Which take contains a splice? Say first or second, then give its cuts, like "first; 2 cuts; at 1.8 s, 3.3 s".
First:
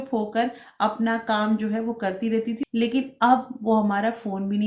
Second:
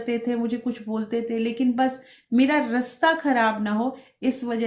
first; 1 cut; at 2.6 s